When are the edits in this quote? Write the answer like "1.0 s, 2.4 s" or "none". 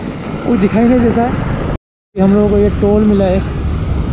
1.7 s